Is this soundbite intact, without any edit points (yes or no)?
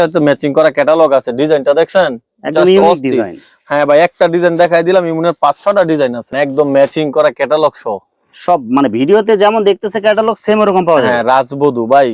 no